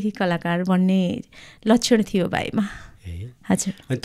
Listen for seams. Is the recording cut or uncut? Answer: uncut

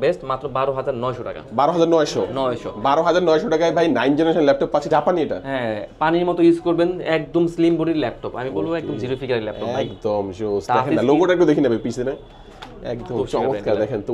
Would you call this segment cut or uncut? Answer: cut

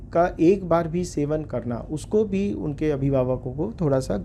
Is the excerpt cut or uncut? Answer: uncut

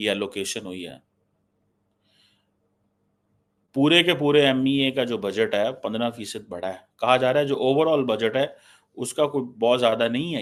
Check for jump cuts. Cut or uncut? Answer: uncut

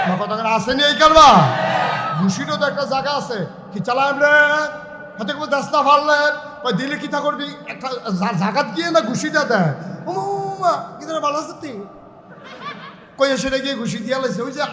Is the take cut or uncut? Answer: uncut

